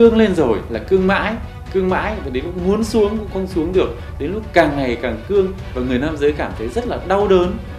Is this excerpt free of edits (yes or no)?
yes